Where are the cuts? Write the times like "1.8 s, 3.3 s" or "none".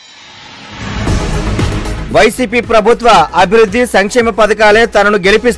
1.6 s